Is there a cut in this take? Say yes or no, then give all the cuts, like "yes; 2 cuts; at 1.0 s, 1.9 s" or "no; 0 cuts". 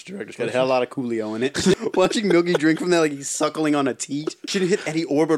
yes; 2 cuts; at 1.7 s, 4.4 s